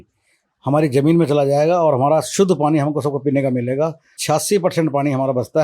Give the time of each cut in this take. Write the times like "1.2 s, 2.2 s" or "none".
4.2 s